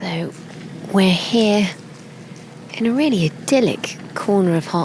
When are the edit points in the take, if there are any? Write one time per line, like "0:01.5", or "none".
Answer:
none